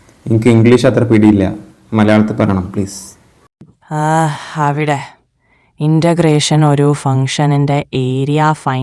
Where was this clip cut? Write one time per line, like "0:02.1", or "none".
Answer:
none